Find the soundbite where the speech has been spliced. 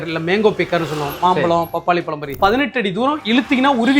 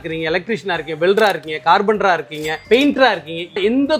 first; 1 cut; at 2.3 s

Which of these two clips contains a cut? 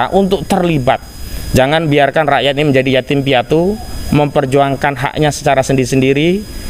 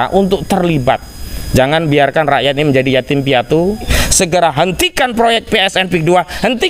second; 1 cut; at 3.9 s

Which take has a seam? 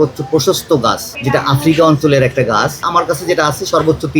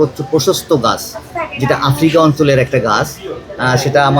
first; 2 cuts; at 1.1 s, 2.8 s

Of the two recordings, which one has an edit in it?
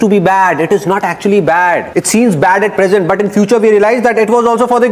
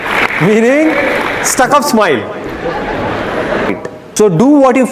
second; 1 cut; at 3.7 s

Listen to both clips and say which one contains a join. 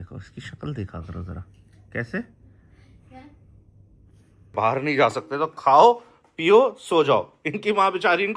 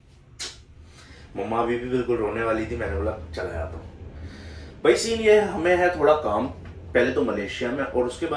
first; 1 cut; at 4.5 s

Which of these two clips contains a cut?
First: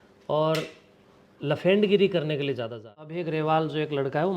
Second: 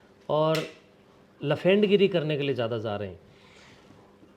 first; 1 cut; at 3.1 s

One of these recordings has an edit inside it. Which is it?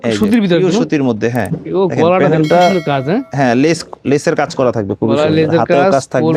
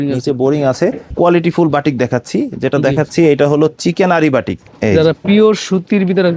second; 2 cuts; at 1.1 s, 4.6 s

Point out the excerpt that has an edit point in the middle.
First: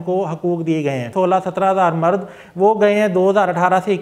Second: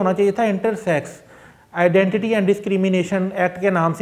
first; 1 cut; at 1.1 s

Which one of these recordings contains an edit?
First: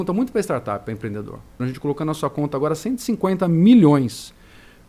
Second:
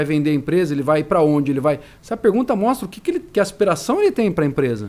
first; 1 cut; at 1.6 s

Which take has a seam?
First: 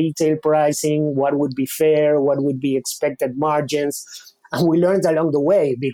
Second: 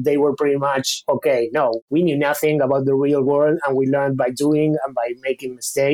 second; 1 cut; at 1.8 s

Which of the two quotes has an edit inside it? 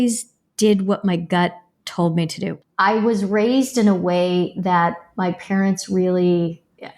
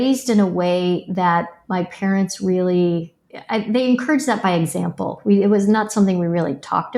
first; 1 cut; at 2.6 s

